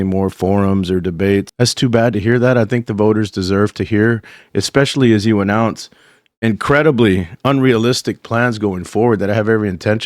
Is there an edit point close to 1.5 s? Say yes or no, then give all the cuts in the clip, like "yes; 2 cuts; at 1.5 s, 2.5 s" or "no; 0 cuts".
yes; 1 cut; at 1.5 s